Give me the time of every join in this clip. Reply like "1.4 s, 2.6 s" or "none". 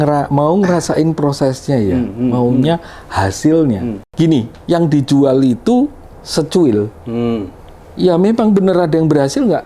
4.0 s

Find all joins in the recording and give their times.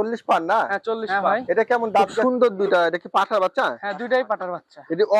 2.2 s

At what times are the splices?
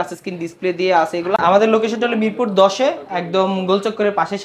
1.4 s

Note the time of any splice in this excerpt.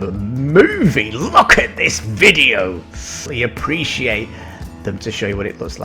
3.2 s

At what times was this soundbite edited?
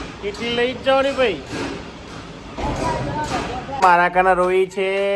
3.7 s

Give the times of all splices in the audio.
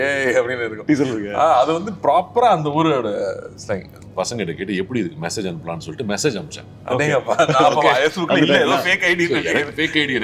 3.9 s

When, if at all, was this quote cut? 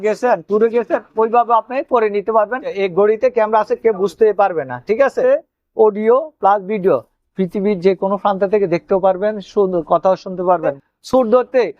2.7 s, 5.2 s, 10.8 s

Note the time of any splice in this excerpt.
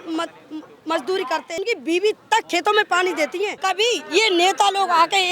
1.6 s, 3.6 s

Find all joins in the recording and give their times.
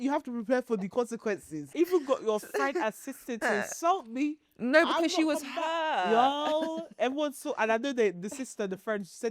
1.7 s

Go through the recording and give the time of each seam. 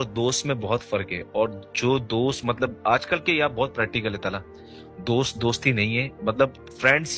none

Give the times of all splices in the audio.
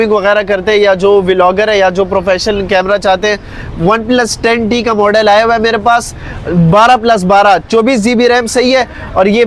none

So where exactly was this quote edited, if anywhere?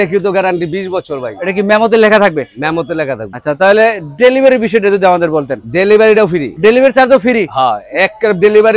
none

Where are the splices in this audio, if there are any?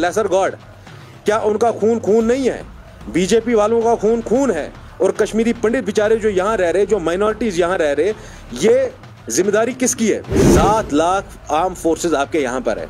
10.5 s

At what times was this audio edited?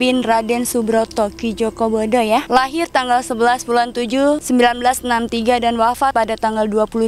2.5 s, 4.4 s, 6.1 s

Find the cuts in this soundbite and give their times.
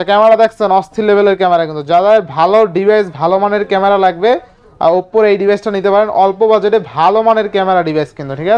none

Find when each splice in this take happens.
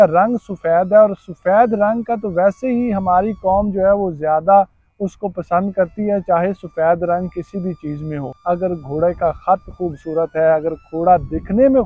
8.3 s

